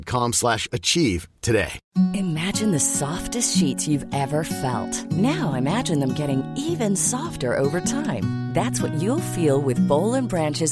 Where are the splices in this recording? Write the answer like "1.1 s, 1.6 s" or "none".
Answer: 1.8 s